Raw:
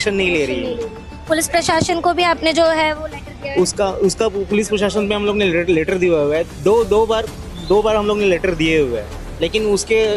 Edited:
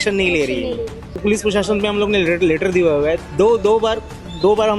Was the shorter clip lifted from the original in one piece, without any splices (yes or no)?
no